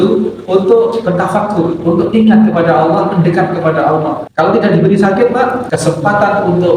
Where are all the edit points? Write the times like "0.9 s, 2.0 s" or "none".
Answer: 1.8 s, 4.2 s, 5.6 s